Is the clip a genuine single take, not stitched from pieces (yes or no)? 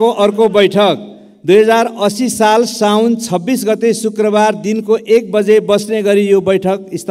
yes